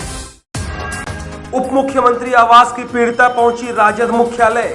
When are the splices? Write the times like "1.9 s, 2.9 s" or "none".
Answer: 1.2 s